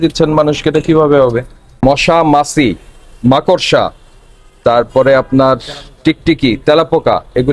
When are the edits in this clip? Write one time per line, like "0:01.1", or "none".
0:01.7